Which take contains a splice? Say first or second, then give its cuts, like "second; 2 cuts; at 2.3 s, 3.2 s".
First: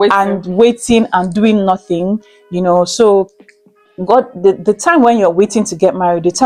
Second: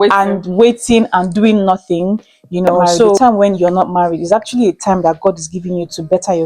second; 1 cut; at 3.2 s